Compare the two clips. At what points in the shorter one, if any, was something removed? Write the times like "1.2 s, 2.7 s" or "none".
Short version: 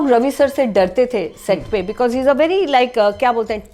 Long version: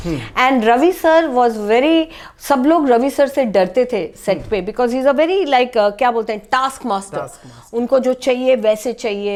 none